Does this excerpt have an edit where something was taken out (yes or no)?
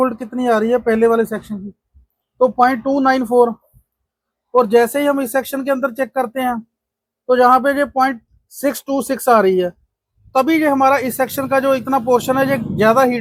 no